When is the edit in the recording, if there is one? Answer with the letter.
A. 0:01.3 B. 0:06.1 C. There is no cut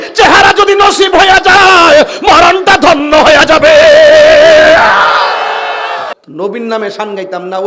B